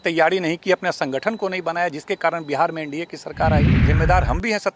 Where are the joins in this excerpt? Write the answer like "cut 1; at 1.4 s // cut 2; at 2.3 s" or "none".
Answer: cut 1; at 3.8 s

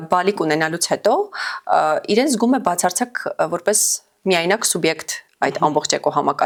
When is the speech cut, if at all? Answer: none

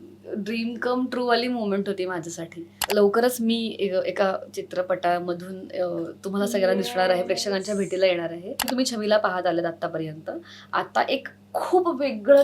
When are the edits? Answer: cut 1; at 2.8 s // cut 2; at 8.7 s

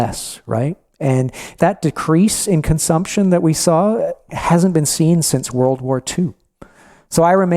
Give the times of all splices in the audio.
cut 1; at 1.5 s

